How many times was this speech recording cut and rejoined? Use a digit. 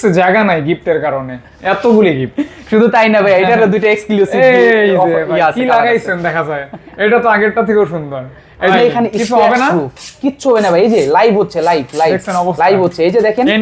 1